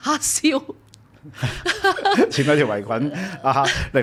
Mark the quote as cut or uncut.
uncut